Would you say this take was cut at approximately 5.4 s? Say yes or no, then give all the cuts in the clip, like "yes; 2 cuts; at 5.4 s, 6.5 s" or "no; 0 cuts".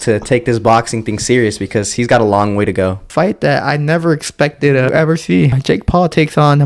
yes; 2 cuts; at 3.1 s, 5.4 s